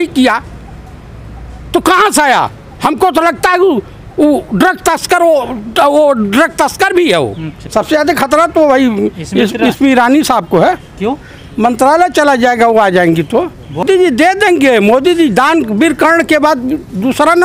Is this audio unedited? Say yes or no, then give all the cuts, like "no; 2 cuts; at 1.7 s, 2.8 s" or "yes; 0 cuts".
no; 2 cuts; at 7.5 s, 13.8 s